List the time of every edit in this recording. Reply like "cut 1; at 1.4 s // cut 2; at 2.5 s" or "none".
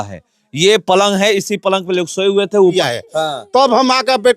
cut 1; at 2.7 s

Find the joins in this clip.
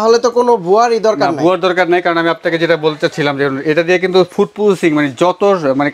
none

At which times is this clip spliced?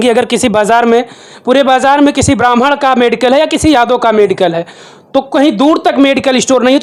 none

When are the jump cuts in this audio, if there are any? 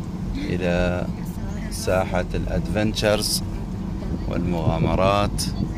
none

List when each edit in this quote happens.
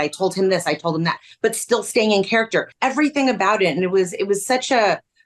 cut 1; at 2.7 s

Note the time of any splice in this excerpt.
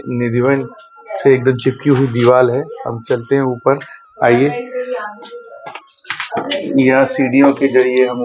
none

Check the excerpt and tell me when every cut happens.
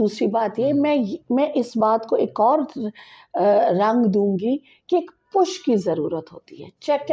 none

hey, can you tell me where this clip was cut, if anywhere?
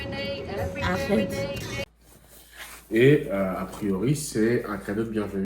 cut 1; at 1.8 s

